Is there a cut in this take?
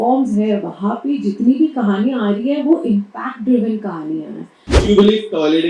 yes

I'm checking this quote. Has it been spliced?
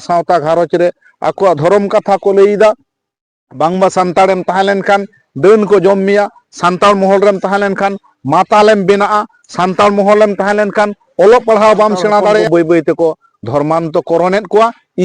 yes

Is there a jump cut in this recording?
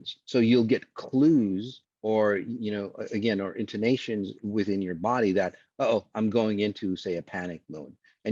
no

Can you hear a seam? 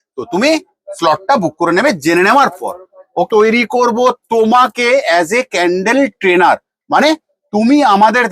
yes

